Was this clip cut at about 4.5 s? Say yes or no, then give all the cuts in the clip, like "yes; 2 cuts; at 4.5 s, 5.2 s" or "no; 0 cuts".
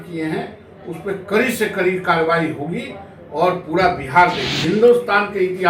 yes; 1 cut; at 4.5 s